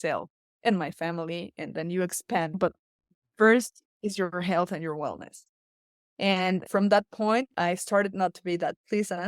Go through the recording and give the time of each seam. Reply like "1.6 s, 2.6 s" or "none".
2.6 s, 6.7 s, 7.5 s